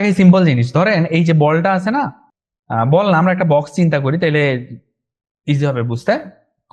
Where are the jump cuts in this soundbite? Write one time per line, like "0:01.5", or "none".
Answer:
none